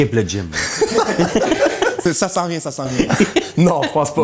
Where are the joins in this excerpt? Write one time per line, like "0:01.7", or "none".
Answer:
none